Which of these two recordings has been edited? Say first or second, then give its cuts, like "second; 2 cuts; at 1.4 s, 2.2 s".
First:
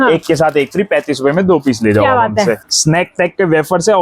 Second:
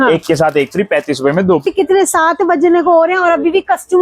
second; 1 cut; at 1.7 s